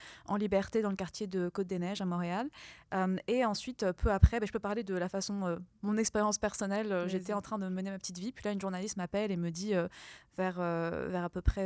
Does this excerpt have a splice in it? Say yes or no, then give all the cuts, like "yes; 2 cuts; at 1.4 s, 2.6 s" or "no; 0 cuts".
no; 0 cuts